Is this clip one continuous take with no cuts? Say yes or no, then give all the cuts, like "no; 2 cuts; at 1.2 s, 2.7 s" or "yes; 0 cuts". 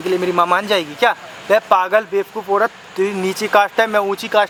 yes; 0 cuts